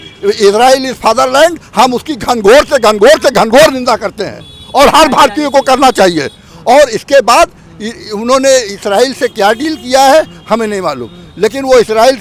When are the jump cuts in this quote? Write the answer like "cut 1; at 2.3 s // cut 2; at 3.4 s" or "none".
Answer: none